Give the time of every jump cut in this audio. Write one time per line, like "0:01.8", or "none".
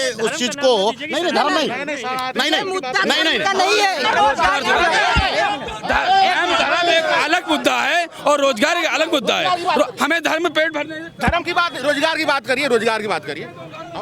0:04.0